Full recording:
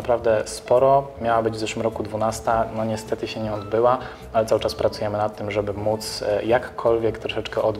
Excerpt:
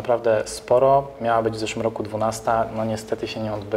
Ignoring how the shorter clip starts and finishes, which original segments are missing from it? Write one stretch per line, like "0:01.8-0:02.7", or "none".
none